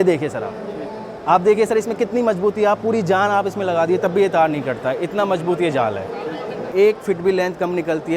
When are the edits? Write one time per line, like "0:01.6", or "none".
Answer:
0:06.7